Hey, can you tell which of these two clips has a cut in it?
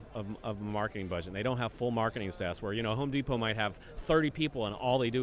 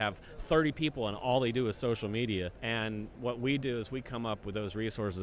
second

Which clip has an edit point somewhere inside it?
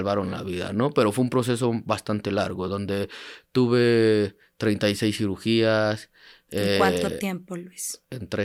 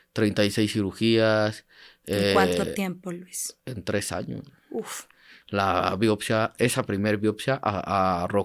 second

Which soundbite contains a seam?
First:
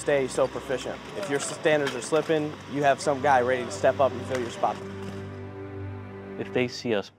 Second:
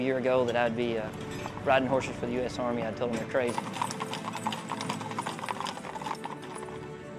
first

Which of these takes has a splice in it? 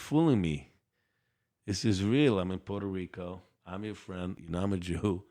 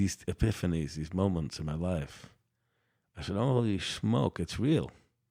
first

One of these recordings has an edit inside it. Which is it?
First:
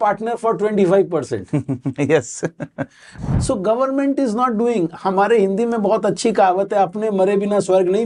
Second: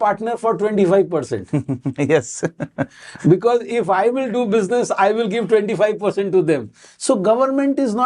first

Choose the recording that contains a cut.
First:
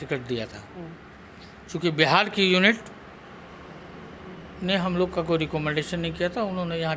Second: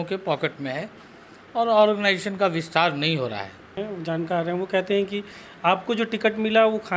second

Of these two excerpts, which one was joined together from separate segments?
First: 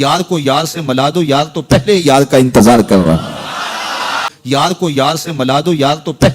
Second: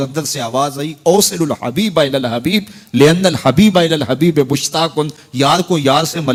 first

